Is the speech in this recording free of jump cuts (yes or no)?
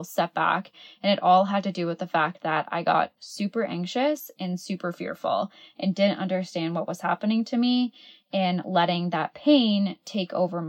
yes